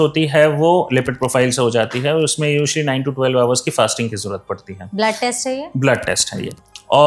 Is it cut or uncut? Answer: uncut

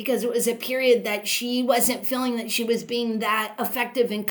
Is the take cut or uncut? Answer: uncut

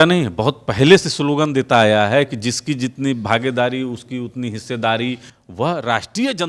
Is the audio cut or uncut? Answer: cut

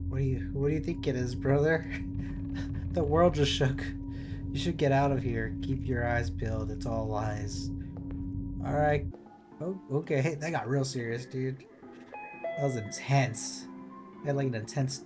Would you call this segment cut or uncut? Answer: uncut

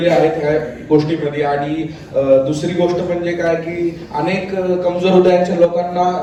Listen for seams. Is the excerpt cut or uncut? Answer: uncut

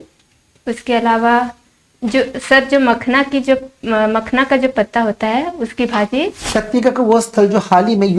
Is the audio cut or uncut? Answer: cut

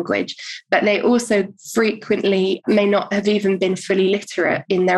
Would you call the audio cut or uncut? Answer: cut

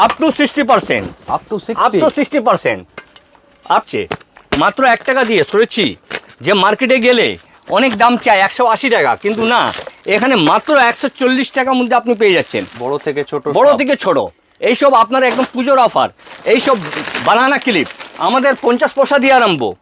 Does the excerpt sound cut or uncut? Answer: cut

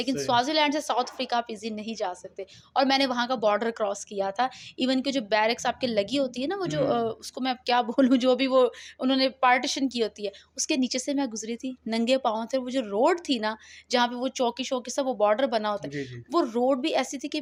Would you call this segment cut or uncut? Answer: uncut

